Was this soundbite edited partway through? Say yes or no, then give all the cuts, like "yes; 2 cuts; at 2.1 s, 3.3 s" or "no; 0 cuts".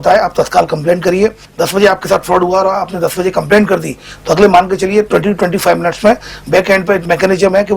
yes; 2 cuts; at 1.4 s, 7.0 s